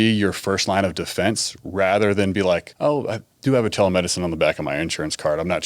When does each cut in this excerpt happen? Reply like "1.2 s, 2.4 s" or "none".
2.7 s